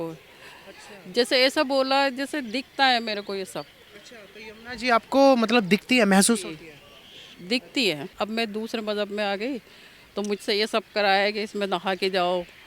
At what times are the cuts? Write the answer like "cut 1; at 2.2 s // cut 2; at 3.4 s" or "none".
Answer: cut 1; at 8.1 s